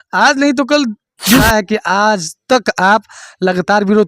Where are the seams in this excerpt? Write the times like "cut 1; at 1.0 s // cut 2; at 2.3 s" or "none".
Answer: cut 1; at 1.4 s